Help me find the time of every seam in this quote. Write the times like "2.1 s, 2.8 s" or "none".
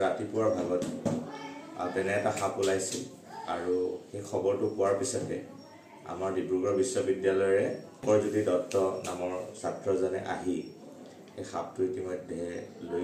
7.9 s